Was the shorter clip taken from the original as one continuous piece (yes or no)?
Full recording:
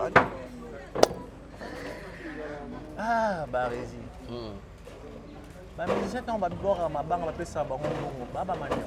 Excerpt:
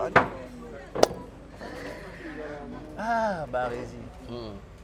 yes